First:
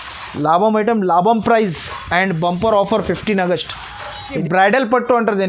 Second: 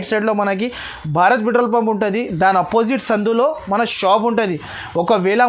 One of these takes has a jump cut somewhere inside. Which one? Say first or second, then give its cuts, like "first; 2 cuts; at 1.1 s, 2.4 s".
first; 1 cut; at 4.3 s